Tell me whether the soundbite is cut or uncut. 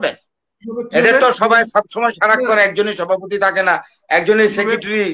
uncut